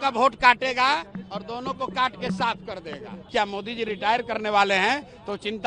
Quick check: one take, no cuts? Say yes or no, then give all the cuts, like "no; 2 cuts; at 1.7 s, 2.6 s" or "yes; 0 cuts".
no; 1 cut; at 3.2 s